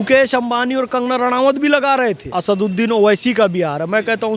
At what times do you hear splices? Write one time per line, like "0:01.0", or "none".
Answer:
0:02.3